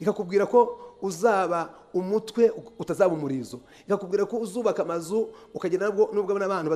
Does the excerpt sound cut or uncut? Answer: uncut